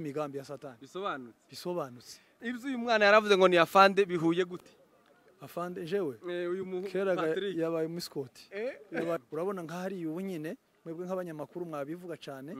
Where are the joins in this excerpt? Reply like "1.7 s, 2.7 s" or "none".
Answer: 2.3 s, 9.2 s

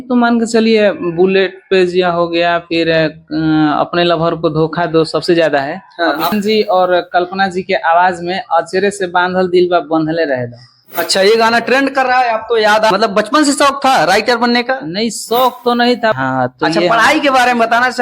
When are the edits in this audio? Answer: 6.3 s, 12.9 s, 16.1 s

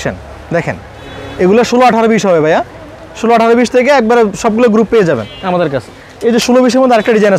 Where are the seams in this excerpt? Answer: none

